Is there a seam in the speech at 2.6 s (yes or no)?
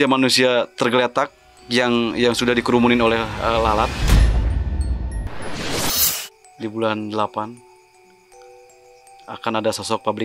no